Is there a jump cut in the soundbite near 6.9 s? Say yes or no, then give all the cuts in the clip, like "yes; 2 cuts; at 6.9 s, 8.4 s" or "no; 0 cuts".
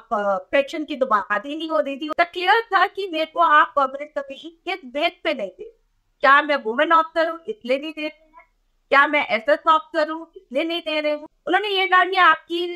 no; 2 cuts; at 2.1 s, 11.3 s